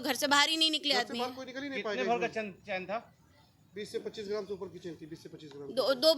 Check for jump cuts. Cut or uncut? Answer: uncut